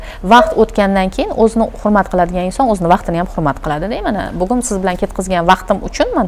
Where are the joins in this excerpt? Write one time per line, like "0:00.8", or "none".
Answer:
none

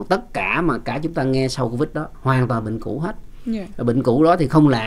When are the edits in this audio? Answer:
none

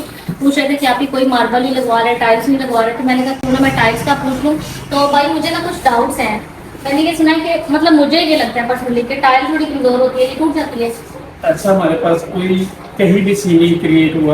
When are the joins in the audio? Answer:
none

